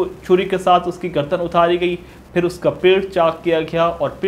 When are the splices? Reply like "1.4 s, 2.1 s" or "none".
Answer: none